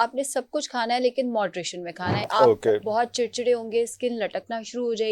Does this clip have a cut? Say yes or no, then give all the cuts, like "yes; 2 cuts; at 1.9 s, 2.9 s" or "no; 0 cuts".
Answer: yes; 1 cut; at 2.2 s